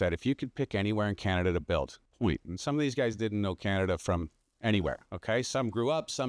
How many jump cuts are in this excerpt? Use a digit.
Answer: 1